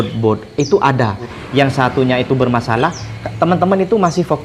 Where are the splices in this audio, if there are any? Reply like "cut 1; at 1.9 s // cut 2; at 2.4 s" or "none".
cut 1; at 1.4 s